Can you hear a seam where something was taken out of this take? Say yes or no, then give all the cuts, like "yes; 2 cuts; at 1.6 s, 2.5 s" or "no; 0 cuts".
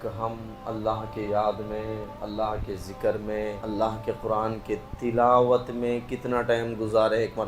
yes; 2 cuts; at 2.1 s, 3.6 s